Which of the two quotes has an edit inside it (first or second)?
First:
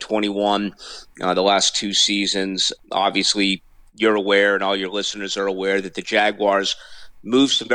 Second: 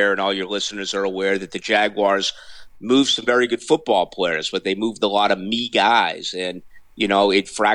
first